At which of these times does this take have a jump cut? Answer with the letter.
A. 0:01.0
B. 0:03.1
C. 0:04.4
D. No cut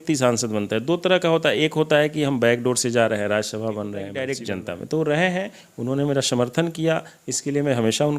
C